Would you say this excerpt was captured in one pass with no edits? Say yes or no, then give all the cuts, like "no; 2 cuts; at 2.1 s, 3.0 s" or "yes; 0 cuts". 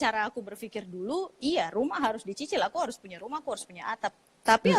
yes; 0 cuts